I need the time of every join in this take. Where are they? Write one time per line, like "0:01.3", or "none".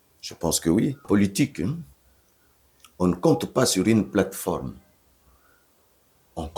0:01.0